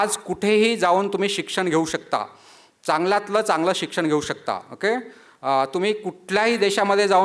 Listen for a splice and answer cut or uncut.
uncut